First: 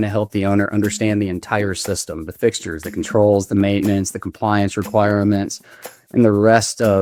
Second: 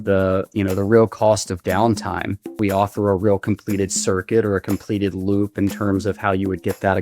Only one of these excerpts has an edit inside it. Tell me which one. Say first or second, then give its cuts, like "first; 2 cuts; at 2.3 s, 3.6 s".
second; 1 cut; at 2.6 s